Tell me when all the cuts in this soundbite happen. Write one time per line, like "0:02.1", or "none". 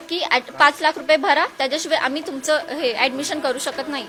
none